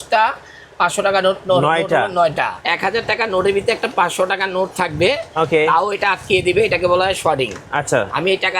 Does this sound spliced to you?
yes; 1 cut; at 2.6 s

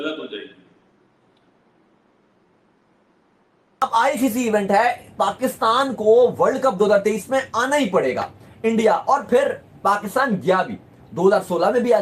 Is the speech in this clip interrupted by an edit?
yes; 1 cut; at 3.8 s

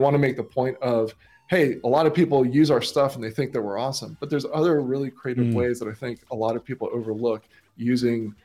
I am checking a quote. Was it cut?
no; 0 cuts

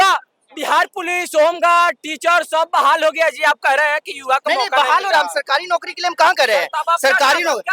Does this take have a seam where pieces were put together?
no; 0 cuts

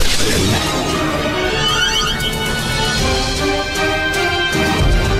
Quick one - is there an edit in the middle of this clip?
no; 0 cuts

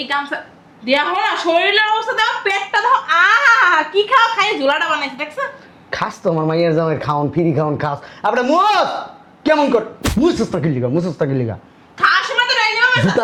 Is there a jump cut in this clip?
no; 0 cuts

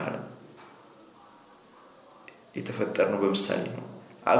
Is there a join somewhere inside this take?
no; 0 cuts

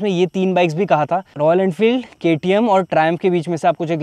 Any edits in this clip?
no; 0 cuts

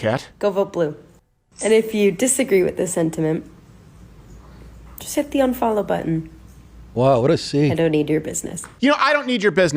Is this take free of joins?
no; 1 cut; at 8.7 s

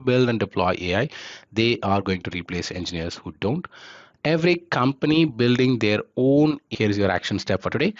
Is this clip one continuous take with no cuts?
no; 1 cut; at 6.7 s

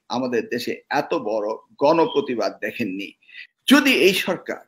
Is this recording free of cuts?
no; 1 cut; at 3.4 s

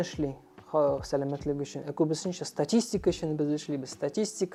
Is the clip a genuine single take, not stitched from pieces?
yes; 0 cuts

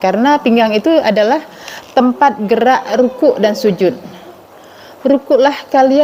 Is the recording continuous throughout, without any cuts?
yes; 0 cuts

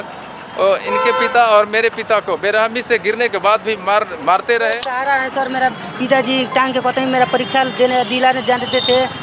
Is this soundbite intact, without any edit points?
no; 1 cut; at 4.9 s

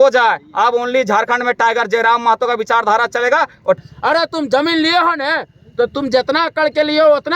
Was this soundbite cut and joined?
yes; 1 cut; at 3.8 s

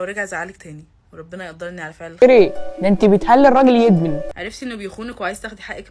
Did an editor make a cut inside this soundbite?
no; 0 cuts

